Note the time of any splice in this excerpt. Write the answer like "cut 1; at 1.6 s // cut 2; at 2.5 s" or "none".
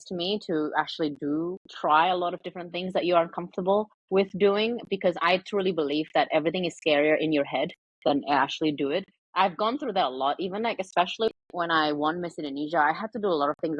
cut 1; at 11.3 s